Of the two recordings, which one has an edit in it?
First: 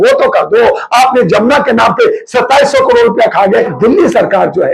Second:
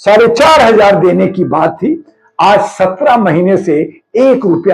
first; 1 cut; at 3.7 s

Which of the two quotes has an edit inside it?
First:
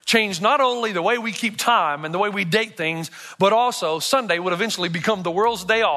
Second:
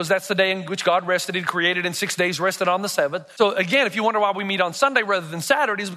second; 1 cut; at 3.2 s

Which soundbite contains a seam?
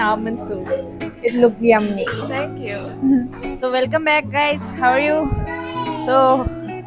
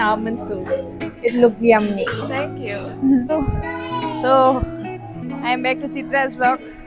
second; 1 cut; at 3.3 s

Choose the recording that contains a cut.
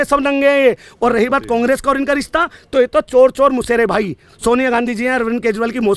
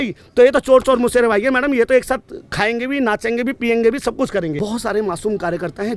second; 1 cut; at 4.5 s

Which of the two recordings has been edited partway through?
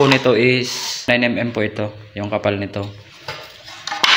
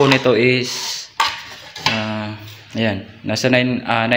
first; 1 cut; at 1.1 s

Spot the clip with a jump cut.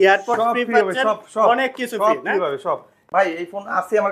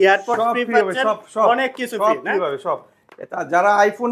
first; 1 cut; at 3.1 s

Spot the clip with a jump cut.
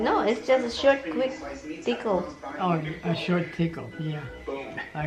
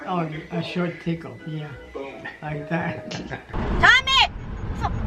second; 1 cut; at 3.5 s

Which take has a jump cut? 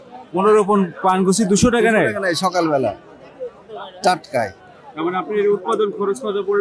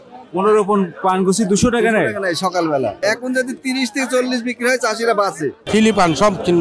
second; 2 cuts; at 3.0 s, 5.6 s

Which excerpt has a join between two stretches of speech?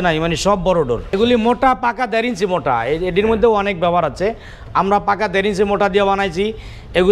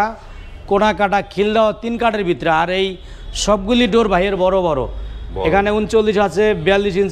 first; 1 cut; at 1.1 s

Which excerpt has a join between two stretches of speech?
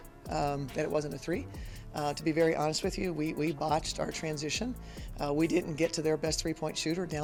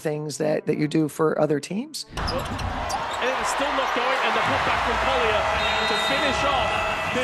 second; 1 cut; at 2.2 s

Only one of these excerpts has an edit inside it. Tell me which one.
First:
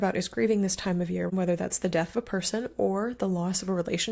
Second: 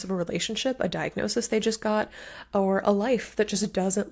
first; 1 cut; at 1.3 s

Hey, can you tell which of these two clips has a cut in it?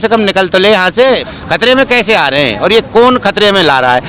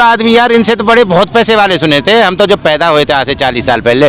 first; 1 cut; at 1.2 s

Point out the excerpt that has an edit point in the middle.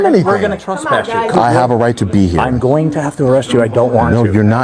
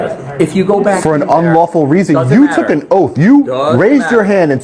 first; 1 cut; at 1.4 s

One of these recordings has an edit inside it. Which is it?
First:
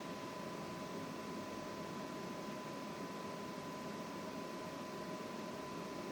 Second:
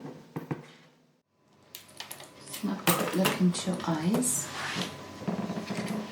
second; 1 cut; at 1.3 s

